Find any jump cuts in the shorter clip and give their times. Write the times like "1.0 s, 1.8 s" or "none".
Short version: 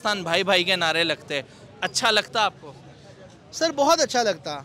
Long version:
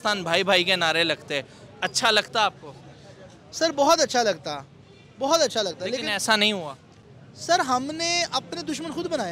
none